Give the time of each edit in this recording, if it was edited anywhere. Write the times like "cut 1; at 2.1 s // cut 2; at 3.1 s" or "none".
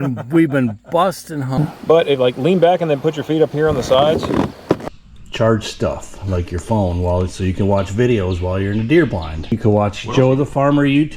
cut 1; at 1.6 s // cut 2; at 5.0 s // cut 3; at 9.4 s